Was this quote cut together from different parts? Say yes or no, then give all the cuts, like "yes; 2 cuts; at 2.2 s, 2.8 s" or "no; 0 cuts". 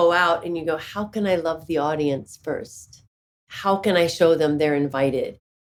no; 0 cuts